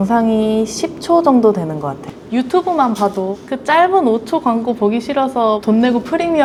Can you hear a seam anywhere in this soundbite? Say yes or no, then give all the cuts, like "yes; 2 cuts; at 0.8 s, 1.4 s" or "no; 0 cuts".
no; 0 cuts